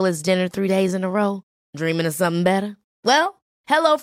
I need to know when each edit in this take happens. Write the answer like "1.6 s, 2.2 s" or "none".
none